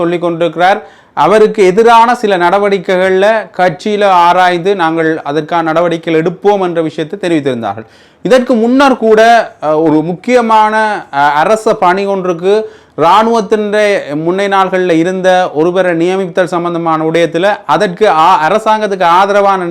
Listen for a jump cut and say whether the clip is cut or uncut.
uncut